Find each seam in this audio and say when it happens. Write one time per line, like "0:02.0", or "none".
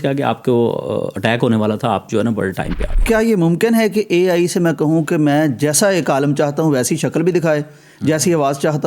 0:03.0